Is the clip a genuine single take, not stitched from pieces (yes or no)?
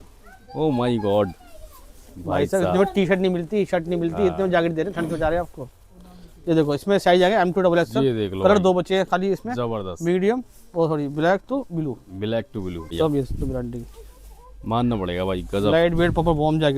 no